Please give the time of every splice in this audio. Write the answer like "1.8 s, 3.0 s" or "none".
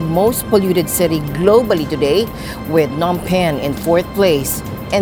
none